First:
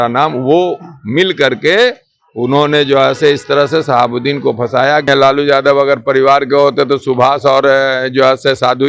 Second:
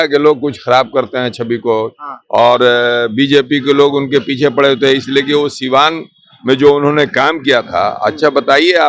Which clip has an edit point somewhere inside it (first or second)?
first